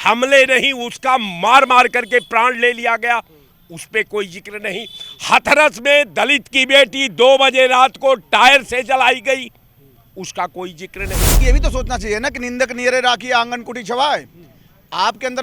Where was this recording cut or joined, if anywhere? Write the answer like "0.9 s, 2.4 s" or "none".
11.4 s